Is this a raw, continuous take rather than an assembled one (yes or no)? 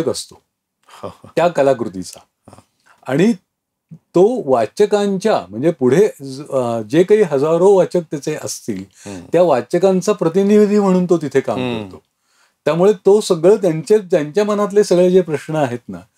yes